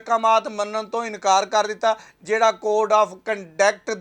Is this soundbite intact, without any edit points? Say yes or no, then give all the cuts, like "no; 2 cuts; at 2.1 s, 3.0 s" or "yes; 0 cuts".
yes; 0 cuts